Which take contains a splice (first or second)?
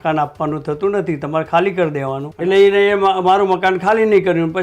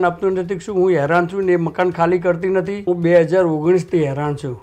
first